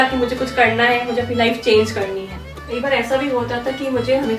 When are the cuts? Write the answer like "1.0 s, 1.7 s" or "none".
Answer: 2.5 s